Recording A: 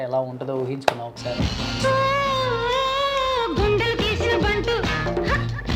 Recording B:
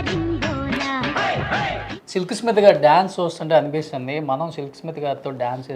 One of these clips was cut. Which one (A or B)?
B